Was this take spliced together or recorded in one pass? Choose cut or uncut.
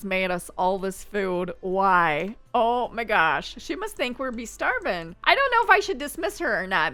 uncut